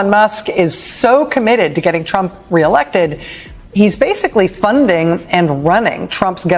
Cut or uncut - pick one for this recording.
uncut